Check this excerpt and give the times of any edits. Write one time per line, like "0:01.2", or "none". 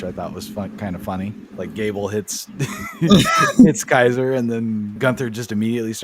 0:01.5
0:04.9